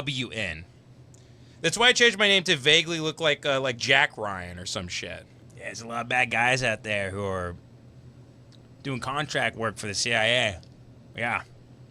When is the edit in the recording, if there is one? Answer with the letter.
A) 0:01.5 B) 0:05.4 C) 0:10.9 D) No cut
B